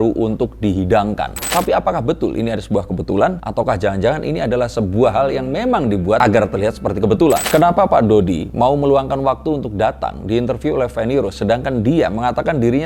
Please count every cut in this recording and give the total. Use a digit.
2